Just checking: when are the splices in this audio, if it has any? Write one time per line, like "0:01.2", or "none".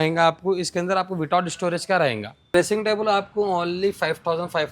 0:02.5

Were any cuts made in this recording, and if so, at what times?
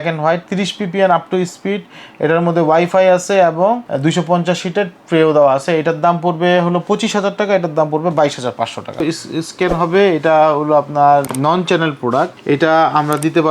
0:03.9
0:09.0
0:11.3
0:12.4

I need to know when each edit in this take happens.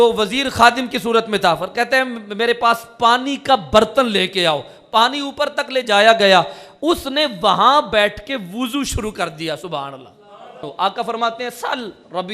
0:10.7

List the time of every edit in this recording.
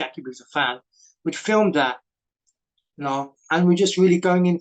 0:03.4

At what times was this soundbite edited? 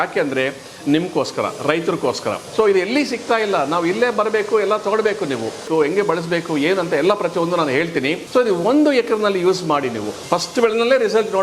0:02.4
0:05.7
0:08.2
0:10.1

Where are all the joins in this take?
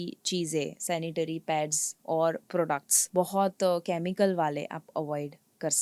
0:03.0

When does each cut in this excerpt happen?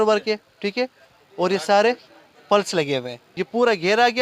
0:03.2

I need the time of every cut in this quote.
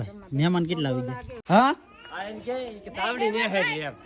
0:01.3

